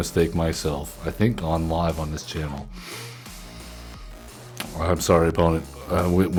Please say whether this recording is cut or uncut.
uncut